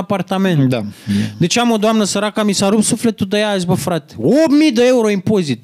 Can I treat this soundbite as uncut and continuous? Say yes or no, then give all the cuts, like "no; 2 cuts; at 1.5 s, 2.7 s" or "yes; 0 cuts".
yes; 0 cuts